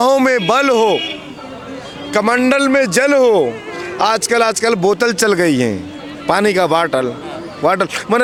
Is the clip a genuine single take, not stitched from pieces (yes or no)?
yes